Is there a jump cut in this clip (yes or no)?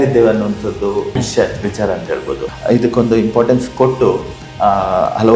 yes